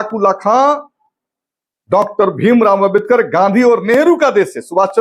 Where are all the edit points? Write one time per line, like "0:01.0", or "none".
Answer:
none